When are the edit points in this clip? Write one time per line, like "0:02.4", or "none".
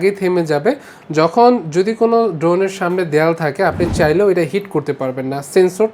none